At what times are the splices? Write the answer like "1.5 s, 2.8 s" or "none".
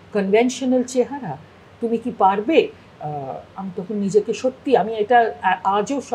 none